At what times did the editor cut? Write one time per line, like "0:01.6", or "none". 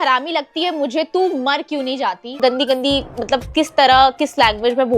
0:02.4

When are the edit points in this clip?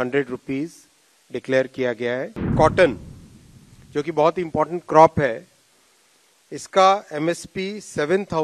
0:02.5

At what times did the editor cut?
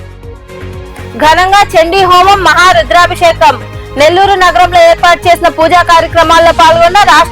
0:01.0

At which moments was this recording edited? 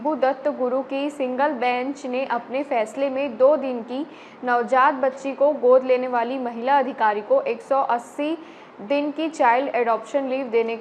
none

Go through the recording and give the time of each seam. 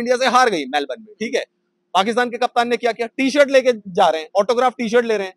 none

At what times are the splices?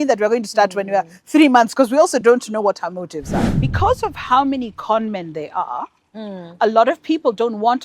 0:03.5

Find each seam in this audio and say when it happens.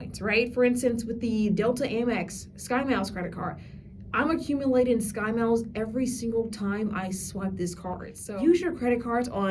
0:08.2

